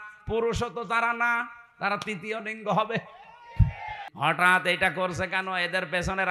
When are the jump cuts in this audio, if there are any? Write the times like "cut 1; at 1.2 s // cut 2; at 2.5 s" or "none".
cut 1; at 4.0 s